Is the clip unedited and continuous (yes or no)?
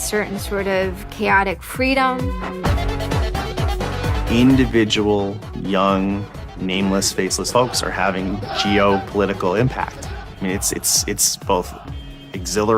no